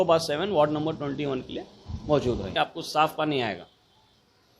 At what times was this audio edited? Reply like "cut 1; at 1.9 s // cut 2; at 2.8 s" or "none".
cut 1; at 2.5 s